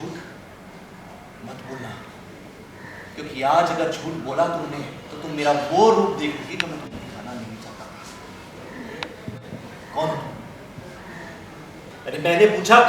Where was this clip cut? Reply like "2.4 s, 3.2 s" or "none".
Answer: 11.9 s

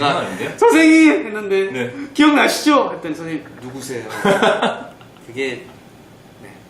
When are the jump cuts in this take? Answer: 4.4 s

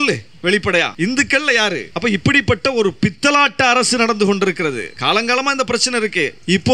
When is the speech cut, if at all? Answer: 0.9 s, 1.9 s, 4.9 s

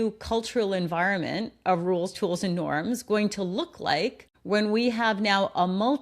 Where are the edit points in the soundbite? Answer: 4.3 s

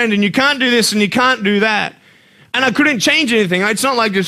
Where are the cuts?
none

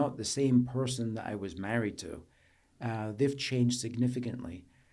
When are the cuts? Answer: none

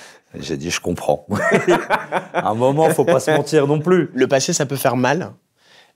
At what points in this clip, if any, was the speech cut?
4.1 s

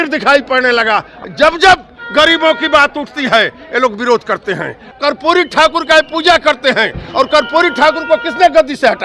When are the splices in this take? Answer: 1.2 s, 4.8 s

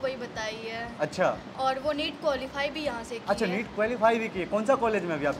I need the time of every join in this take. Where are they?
none

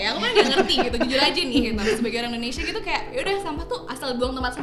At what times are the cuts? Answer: none

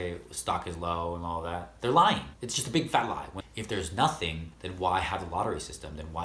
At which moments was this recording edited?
3.4 s

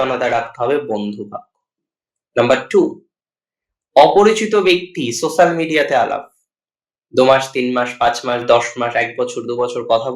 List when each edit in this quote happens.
none

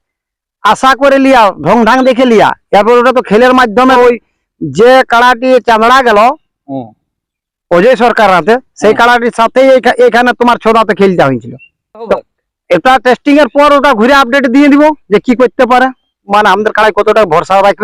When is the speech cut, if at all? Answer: 4.0 s, 12.1 s, 16.2 s

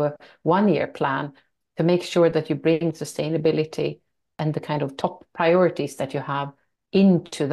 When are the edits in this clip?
4.3 s

